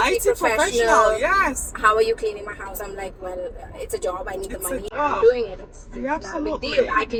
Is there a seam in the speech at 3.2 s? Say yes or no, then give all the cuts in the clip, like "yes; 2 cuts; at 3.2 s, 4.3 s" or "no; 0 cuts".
no; 0 cuts